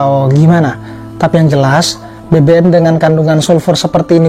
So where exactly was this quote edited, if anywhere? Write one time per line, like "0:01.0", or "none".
none